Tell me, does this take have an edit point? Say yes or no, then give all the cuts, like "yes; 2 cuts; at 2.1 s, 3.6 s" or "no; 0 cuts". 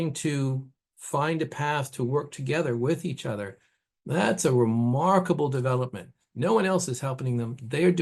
no; 0 cuts